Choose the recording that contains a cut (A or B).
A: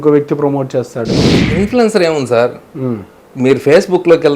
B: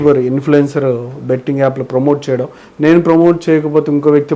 A